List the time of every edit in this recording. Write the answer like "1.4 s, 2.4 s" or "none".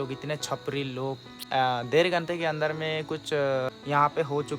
1.4 s, 3.8 s